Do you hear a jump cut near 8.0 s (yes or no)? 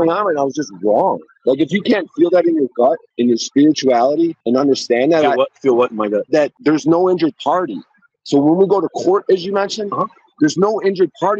no